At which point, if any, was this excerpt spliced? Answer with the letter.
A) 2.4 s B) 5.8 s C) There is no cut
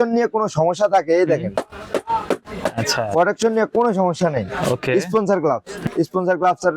B